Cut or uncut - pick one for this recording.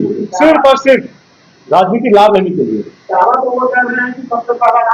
uncut